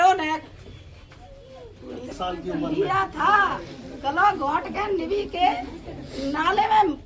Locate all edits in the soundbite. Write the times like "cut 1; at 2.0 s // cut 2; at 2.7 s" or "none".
cut 1; at 2.1 s